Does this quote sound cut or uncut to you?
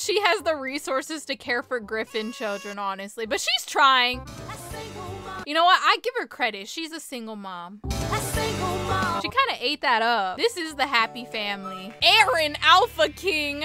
cut